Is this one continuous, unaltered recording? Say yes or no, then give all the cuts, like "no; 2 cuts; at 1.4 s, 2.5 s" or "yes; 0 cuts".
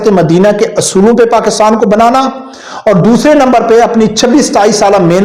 yes; 0 cuts